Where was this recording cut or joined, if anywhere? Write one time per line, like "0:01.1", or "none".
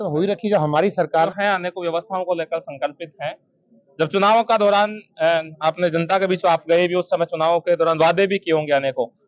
0:01.3